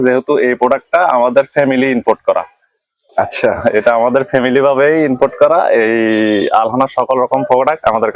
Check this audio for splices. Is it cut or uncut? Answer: uncut